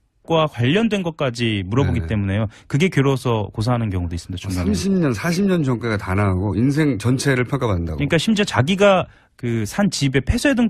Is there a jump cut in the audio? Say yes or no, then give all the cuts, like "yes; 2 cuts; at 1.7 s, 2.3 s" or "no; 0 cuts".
no; 0 cuts